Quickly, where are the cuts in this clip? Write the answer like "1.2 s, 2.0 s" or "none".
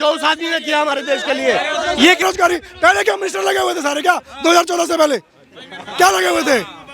2.2 s